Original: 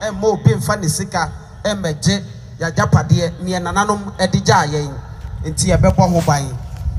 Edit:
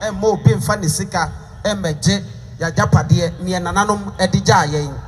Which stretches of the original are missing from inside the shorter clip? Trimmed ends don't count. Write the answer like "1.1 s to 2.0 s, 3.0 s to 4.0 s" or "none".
none